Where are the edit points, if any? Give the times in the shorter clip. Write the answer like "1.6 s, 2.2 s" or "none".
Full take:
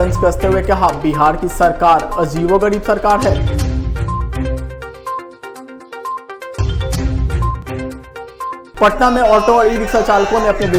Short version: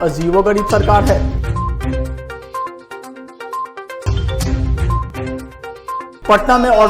1.2 s